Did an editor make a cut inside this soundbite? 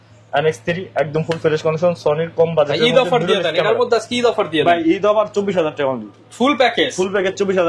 no; 0 cuts

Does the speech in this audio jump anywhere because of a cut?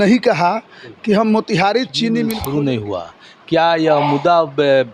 yes; 1 cut; at 2.4 s

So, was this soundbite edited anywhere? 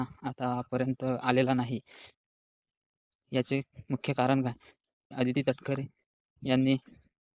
yes; 1 cut; at 5.1 s

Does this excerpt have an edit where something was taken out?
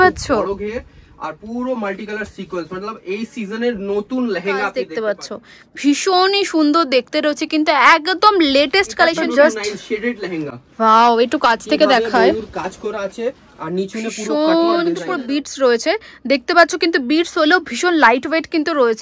yes; 3 cuts; at 4.9 s, 9.2 s, 15.1 s

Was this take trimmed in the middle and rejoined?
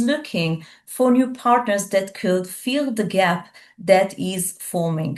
no; 0 cuts

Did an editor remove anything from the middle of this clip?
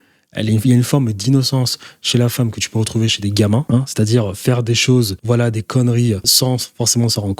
yes; 3 cuts; at 3.6 s, 5.2 s, 6.3 s

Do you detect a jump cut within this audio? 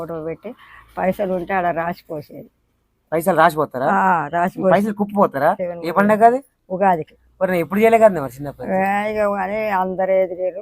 yes; 1 cut; at 5.7 s

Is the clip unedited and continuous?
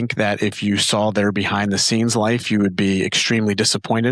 yes; 0 cuts

